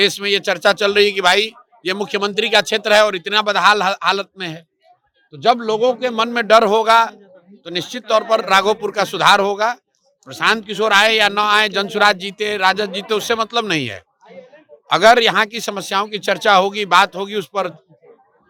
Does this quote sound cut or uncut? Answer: uncut